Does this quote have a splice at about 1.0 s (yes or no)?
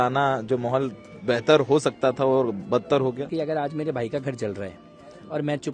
no